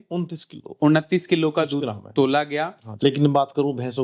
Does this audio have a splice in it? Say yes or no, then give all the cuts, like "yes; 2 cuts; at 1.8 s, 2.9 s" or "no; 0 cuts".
yes; 1 cut; at 2.8 s